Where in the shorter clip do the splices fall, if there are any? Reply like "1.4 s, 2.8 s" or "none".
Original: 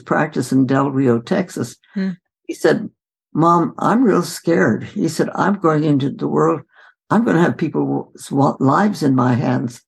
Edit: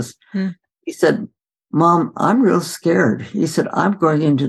none